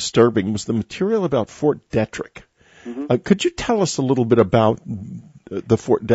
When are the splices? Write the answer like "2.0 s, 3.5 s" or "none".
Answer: 4.8 s

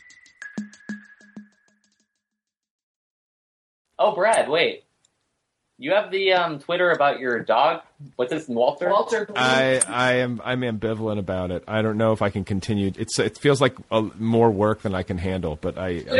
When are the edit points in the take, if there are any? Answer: none

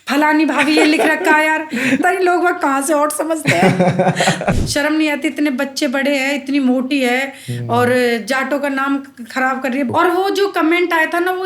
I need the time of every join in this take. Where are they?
2.0 s, 4.5 s, 9.9 s

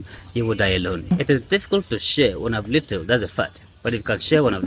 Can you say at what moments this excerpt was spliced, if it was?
1.1 s

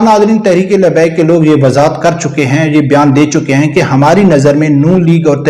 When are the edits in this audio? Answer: none

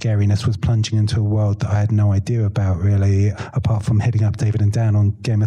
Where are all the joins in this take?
3.4 s

